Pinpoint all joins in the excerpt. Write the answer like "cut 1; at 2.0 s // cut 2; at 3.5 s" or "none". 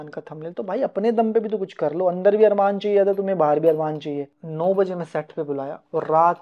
cut 1; at 4.3 s